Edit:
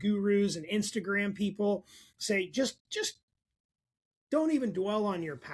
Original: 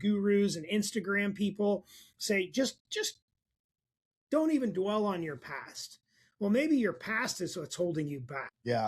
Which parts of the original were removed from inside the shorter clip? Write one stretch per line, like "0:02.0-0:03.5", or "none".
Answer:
none